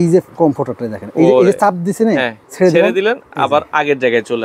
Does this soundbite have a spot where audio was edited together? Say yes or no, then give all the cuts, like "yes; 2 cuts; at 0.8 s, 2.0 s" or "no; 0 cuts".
yes; 1 cut; at 2.4 s